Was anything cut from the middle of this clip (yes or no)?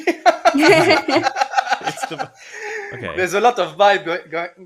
no